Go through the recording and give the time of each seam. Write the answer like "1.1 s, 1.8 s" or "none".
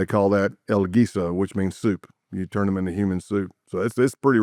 none